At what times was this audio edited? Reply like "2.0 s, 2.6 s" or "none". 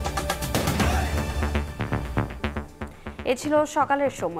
none